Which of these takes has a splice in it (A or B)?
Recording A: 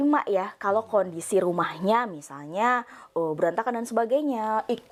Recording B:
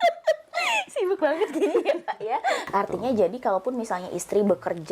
B